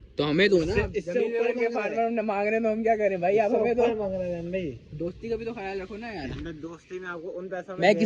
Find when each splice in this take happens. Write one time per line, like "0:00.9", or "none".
none